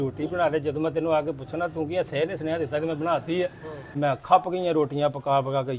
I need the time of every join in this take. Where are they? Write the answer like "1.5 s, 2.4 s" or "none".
3.9 s